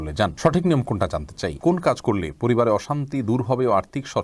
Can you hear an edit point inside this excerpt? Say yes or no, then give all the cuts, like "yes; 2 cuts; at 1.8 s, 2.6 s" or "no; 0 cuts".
yes; 1 cut; at 1.6 s